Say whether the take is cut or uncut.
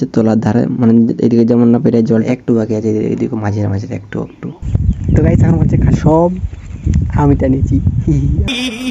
cut